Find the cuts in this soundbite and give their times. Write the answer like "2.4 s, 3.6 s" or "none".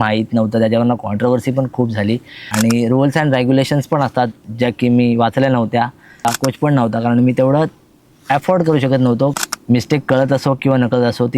2.4 s, 6.2 s, 9.4 s